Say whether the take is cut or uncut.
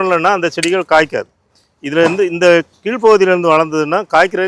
uncut